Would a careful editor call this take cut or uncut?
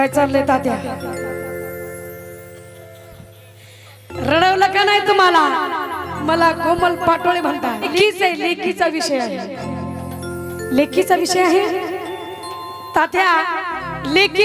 cut